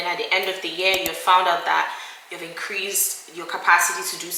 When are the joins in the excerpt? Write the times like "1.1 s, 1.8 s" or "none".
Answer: none